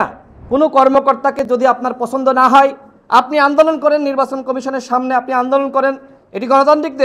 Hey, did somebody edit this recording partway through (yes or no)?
no